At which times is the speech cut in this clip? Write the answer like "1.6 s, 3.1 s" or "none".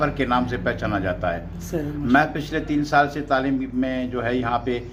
none